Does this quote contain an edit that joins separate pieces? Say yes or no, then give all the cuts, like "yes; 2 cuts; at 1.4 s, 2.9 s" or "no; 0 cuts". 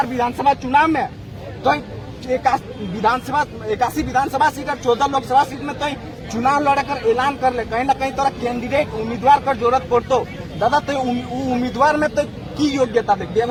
no; 0 cuts